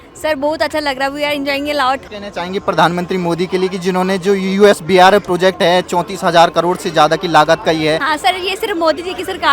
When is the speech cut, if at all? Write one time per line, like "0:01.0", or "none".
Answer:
0:02.0
0:08.1